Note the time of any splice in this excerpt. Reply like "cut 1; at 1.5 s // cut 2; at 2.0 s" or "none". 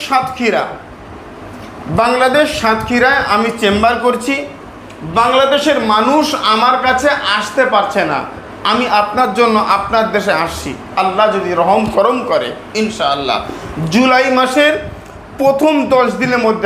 cut 1; at 8.5 s